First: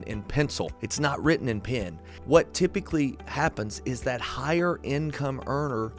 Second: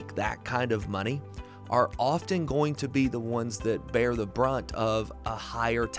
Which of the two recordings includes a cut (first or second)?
first